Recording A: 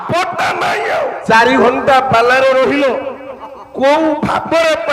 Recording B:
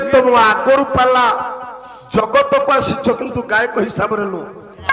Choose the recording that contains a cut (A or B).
A